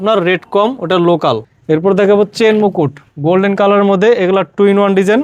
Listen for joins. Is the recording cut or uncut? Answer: cut